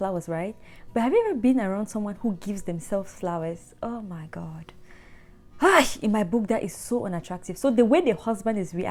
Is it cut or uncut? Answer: uncut